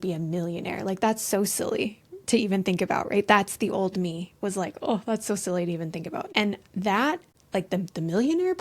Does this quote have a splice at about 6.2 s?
yes; 2 cuts; at 6.2 s, 7.3 s

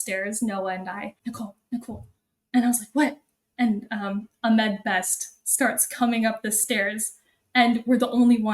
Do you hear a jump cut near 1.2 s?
yes; 1 cut; at 1.2 s

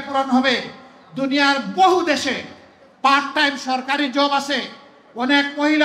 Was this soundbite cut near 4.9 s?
no; 0 cuts

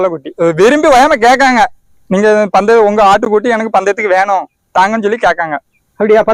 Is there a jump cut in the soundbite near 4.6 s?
no; 0 cuts

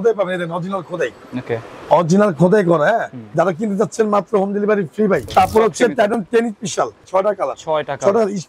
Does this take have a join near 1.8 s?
no; 3 cuts; at 3.2 s, 5.3 s, 7.0 s

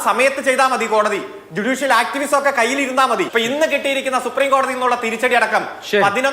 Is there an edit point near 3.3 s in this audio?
yes; 1 cut; at 3.3 s

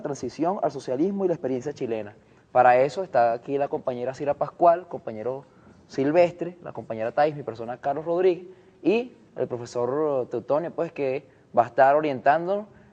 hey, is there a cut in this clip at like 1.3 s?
yes; 1 cut; at 1.3 s

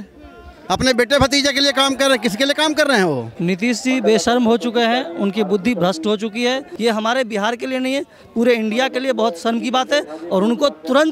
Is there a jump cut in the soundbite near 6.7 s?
yes; 2 cuts; at 3.3 s, 6.7 s

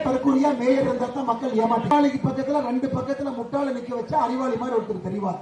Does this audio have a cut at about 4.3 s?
no; 1 cut; at 1.9 s

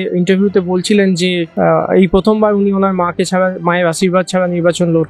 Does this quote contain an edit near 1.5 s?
yes; 1 cut; at 1.5 s

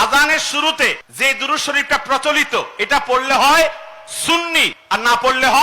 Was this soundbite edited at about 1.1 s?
yes; 2 cuts; at 1.1 s, 4.7 s

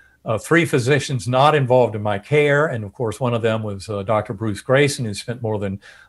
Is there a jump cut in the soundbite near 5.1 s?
no; 0 cuts

